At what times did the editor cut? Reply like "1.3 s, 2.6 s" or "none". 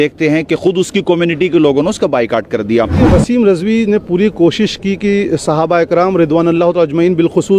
3.0 s